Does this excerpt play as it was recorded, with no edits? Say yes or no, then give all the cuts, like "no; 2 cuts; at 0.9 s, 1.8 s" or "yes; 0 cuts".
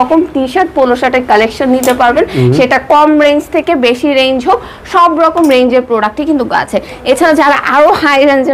yes; 0 cuts